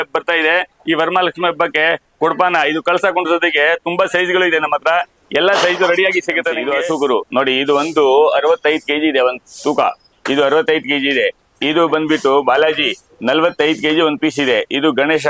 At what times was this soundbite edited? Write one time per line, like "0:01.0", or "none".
0:06.6

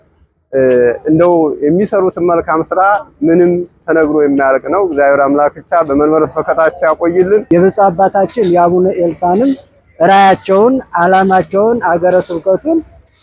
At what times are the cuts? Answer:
0:07.4

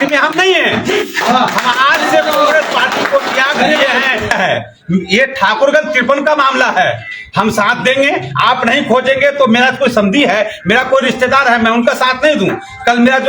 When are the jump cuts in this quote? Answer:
none

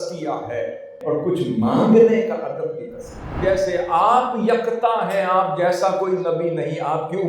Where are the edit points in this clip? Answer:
0:01.0
0:03.3

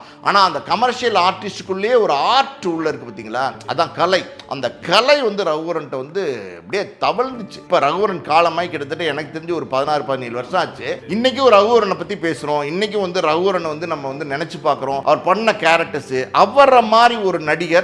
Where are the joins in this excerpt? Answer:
0:07.5
0:11.0
0:15.0

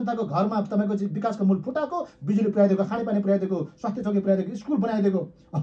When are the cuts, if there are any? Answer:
none

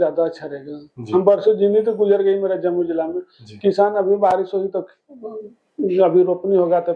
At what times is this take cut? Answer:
none

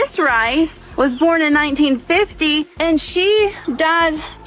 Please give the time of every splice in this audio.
0:03.6

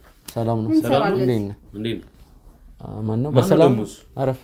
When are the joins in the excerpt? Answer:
none

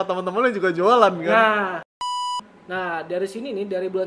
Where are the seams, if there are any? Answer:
0:02.0

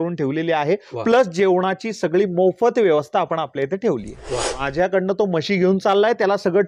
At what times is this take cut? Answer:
0:04.6

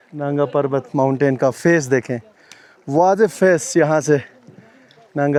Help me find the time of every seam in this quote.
none

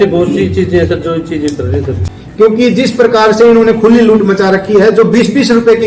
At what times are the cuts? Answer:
0:02.2

